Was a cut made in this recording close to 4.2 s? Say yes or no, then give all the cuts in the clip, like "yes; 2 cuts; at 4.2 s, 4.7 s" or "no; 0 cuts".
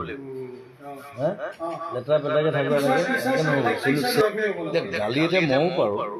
yes; 1 cut; at 4.2 s